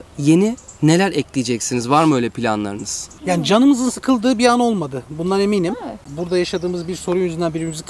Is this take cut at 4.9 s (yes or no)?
no